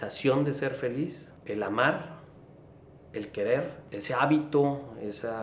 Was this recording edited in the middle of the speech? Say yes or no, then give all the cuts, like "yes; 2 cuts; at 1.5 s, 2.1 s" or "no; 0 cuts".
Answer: yes; 2 cuts; at 1.3 s, 3.8 s